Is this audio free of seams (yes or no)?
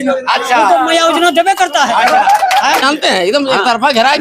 no